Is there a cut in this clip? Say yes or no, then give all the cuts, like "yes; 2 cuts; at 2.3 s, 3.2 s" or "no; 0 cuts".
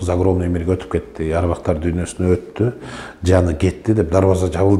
no; 0 cuts